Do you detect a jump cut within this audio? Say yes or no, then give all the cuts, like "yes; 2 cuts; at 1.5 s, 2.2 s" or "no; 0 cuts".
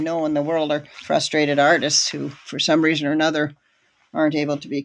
yes; 1 cut; at 0.9 s